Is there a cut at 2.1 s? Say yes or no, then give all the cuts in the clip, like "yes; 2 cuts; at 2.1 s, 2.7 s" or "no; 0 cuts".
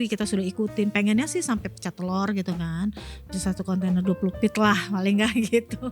no; 0 cuts